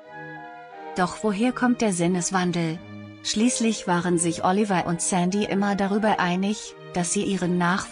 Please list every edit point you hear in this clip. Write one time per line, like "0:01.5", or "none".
0:01.0